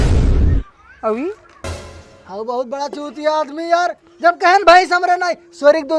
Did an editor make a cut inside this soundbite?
yes; 1 cut; at 1.7 s

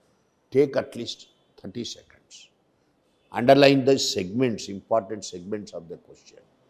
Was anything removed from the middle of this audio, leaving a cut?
no; 0 cuts

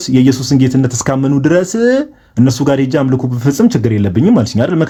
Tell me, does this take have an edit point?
no; 0 cuts

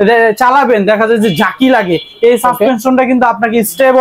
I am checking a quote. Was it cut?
no; 0 cuts

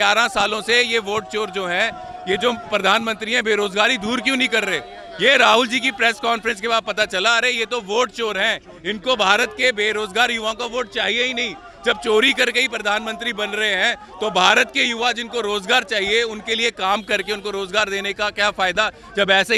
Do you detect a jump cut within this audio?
no; 0 cuts

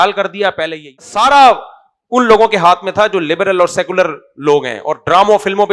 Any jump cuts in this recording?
yes; 1 cut; at 1.1 s

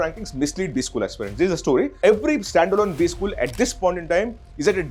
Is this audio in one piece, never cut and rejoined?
no; 1 cut; at 1.9 s

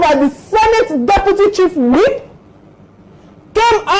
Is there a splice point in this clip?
no; 0 cuts

